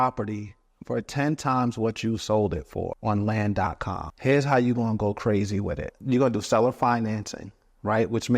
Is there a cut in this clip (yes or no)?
yes